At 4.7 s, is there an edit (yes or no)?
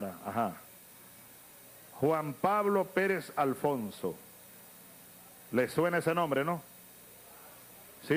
no